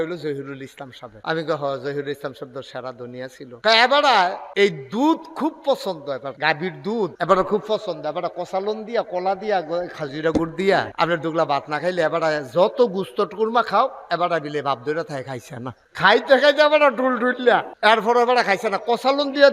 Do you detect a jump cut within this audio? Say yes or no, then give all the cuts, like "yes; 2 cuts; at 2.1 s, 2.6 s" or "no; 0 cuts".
no; 0 cuts